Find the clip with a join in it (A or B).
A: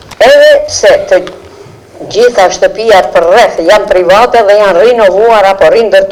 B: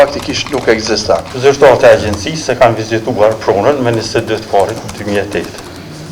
B